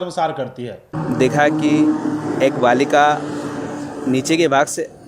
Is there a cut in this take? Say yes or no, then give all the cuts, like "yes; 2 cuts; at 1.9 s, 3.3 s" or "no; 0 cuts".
yes; 1 cut; at 0.9 s